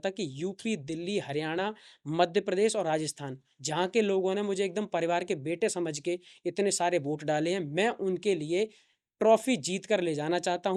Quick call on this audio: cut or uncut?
uncut